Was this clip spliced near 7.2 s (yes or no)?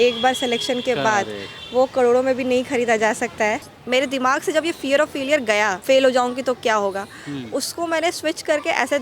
no